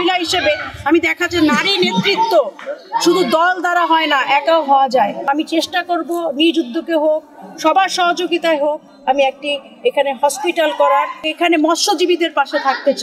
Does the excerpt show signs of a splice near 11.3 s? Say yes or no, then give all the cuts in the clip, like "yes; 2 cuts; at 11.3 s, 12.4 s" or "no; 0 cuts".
yes; 2 cuts; at 5.3 s, 11.3 s